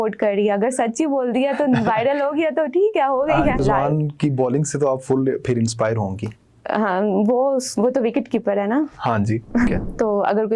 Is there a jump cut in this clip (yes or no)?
yes